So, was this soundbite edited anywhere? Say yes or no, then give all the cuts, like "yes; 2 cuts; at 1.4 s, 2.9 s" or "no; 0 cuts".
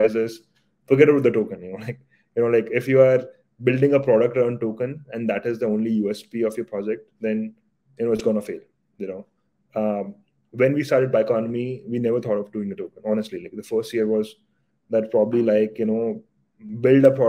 no; 0 cuts